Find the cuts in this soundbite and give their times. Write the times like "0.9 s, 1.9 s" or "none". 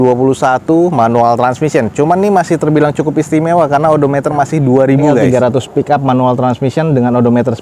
5.2 s